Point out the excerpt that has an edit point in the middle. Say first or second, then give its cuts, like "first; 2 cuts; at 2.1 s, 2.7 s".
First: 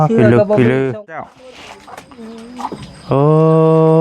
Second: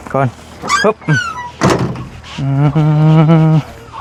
first; 1 cut; at 1.2 s